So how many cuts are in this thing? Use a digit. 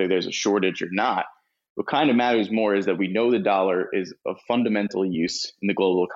0